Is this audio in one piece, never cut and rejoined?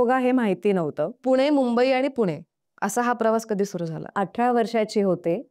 no; 2 cuts; at 1.2 s, 4.2 s

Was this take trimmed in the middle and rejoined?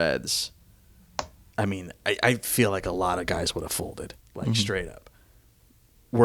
no; 0 cuts

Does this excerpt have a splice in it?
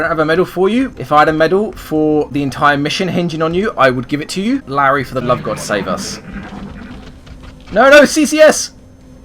yes; 2 cuts; at 0.9 s, 4.6 s

